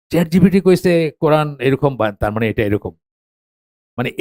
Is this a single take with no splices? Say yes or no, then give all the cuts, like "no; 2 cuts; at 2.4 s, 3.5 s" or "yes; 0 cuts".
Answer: yes; 0 cuts